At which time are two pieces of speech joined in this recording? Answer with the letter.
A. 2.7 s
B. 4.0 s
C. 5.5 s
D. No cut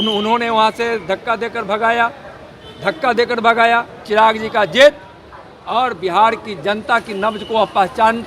B